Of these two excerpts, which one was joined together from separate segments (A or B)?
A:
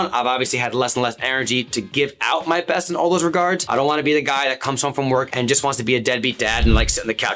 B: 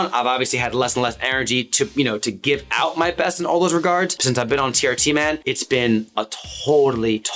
A